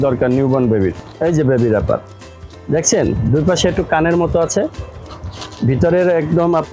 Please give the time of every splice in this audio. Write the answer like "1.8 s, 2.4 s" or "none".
1.1 s